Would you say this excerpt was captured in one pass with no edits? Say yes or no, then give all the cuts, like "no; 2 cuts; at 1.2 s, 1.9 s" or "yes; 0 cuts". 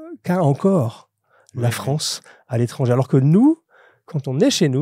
yes; 0 cuts